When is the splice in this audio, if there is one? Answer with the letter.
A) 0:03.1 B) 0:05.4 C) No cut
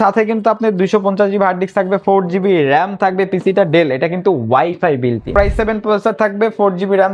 B